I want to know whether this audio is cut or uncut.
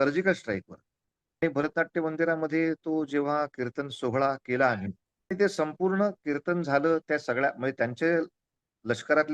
cut